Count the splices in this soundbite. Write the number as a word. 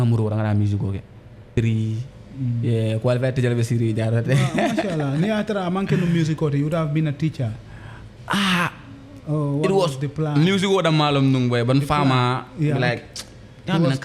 one